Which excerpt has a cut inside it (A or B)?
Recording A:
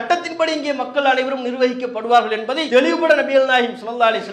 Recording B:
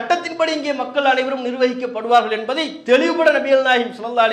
A